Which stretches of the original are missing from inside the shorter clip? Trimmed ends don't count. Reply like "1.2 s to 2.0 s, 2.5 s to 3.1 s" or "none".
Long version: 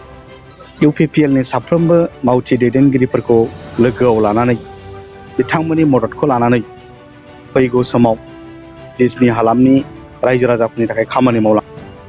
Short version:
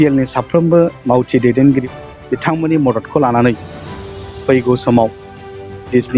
3.0 s to 4.9 s